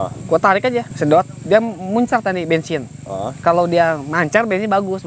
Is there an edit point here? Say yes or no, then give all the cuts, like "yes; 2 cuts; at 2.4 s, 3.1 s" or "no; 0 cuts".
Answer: yes; 1 cut; at 0.9 s